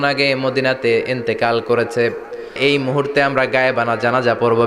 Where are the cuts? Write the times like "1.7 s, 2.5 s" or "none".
2.6 s